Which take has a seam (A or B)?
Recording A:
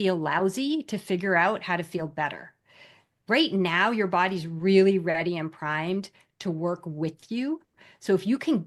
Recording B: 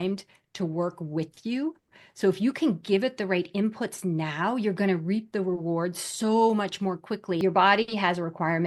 B